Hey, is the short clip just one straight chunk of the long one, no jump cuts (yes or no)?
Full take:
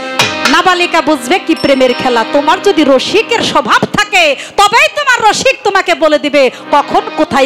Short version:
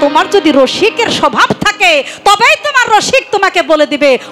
yes